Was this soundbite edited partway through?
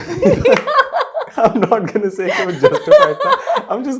yes; 1 cut; at 1.2 s

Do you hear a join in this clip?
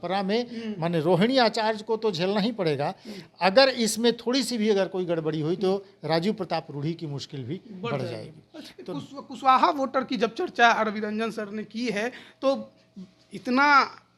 no; 0 cuts

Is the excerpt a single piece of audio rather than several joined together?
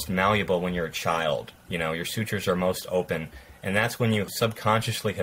no; 1 cut; at 4.3 s

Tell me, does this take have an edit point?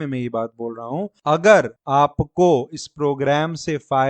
yes; 2 cuts; at 1.1 s, 1.8 s

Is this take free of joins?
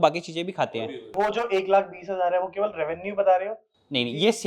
yes; 0 cuts

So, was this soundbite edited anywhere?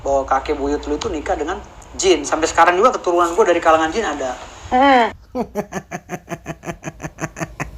no; 0 cuts

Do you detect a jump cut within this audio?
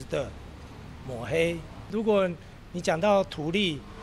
yes; 1 cut; at 1.9 s

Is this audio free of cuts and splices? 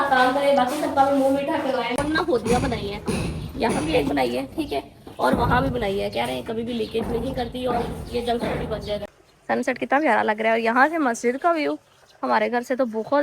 no; 2 cuts; at 2.0 s, 9.1 s

